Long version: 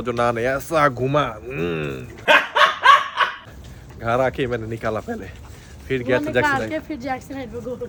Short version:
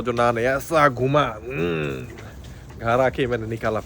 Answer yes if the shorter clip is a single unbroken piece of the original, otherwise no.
no